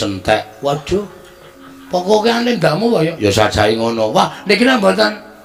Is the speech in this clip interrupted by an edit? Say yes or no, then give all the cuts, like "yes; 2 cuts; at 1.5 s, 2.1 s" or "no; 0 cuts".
no; 0 cuts